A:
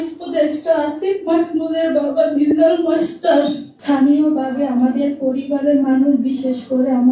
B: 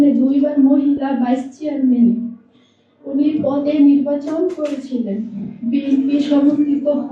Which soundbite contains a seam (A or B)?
A